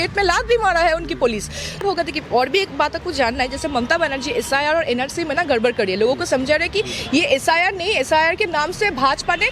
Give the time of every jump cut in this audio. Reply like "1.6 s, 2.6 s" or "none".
1.8 s